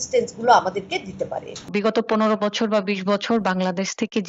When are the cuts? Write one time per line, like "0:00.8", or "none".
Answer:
0:01.7